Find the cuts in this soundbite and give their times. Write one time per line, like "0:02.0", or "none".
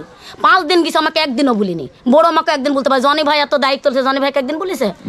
none